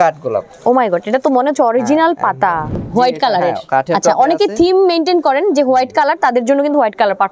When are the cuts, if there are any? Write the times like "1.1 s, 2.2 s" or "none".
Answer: 2.8 s